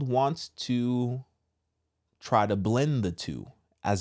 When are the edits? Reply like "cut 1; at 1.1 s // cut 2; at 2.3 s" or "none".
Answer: none